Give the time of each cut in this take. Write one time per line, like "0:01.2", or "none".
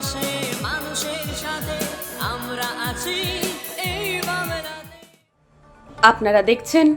none